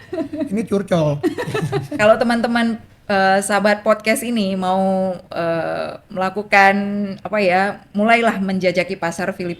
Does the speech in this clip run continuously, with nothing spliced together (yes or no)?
no